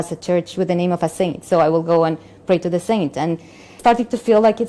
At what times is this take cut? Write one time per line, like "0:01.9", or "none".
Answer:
0:03.7